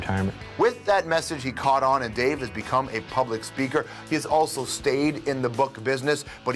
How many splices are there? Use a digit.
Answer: 1